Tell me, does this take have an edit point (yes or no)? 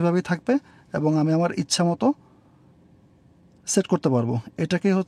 no